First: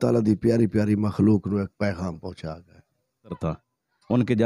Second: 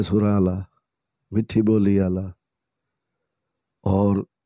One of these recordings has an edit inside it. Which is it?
first; 1 cut; at 3.4 s

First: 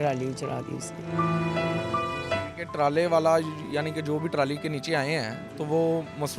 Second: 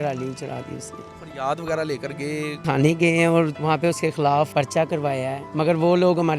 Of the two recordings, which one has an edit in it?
second; 5 cuts; at 1.1 s, 2.6 s, 3.5 s, 4.5 s, 5.4 s

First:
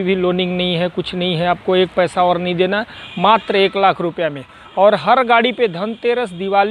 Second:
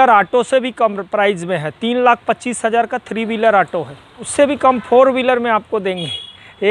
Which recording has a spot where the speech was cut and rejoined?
second; 1 cut; at 4.2 s

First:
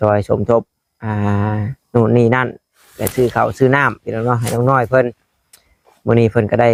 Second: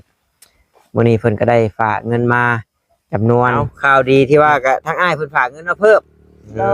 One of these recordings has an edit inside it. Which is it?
second; 1 cut; at 3.7 s

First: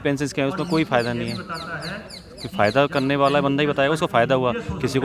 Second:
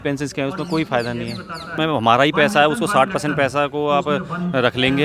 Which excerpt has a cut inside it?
second; 1 cut; at 1.7 s

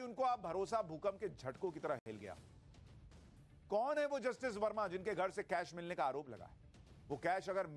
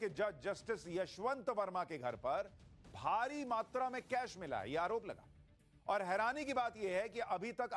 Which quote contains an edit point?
first; 1 cut; at 2.0 s

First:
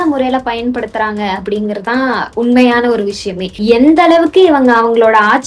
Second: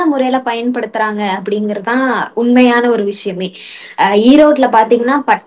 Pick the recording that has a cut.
first; 1 cut; at 3.5 s

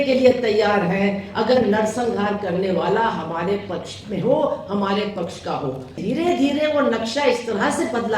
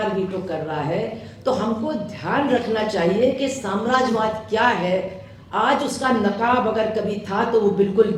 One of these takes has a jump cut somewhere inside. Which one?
first; 1 cut; at 6.0 s

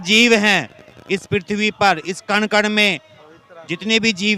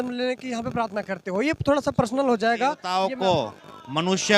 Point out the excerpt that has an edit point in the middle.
second; 1 cut; at 2.9 s

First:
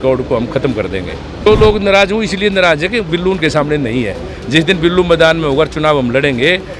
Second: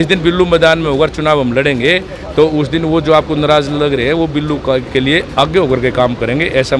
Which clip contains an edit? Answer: first; 1 cut; at 1.5 s

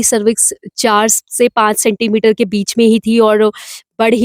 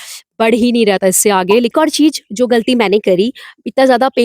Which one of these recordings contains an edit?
second; 1 cut; at 1.7 s

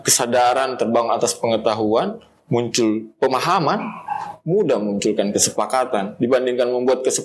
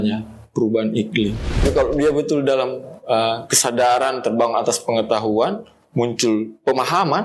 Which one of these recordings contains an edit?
second; 1 cut; at 1.6 s

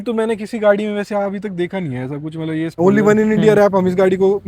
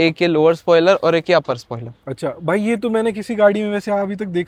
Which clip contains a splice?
first; 1 cut; at 2.8 s

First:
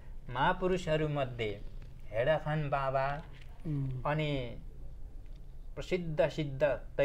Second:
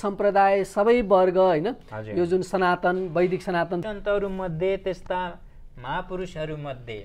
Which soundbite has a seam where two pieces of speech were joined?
second; 1 cut; at 3.8 s

